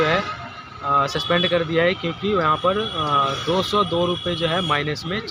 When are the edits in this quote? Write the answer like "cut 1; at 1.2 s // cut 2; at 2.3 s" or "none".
none